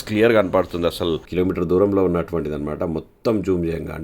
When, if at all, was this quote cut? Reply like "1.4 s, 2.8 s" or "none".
1.3 s